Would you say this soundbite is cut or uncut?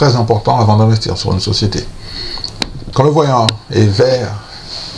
cut